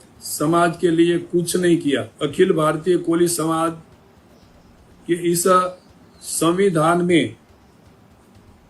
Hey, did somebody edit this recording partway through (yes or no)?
yes